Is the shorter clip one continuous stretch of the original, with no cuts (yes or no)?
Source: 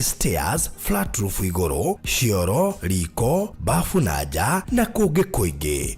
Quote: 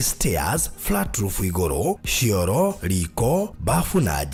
yes